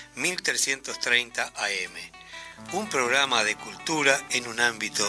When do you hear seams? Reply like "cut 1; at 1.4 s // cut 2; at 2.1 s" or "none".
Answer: none